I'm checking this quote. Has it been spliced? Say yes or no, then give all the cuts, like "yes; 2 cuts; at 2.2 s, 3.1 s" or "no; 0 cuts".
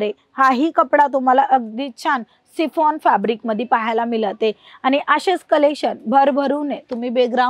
no; 0 cuts